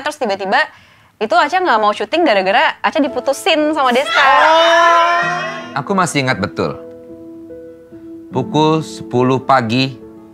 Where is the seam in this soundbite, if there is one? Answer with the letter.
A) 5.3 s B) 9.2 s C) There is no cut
A